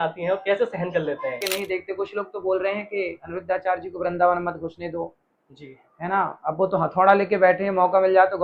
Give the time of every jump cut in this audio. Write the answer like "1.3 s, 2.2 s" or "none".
1.5 s